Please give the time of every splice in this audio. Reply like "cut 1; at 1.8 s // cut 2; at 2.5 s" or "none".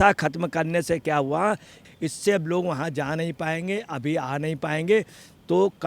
cut 1; at 1.8 s